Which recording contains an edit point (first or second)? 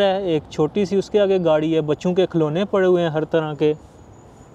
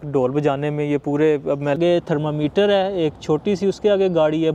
second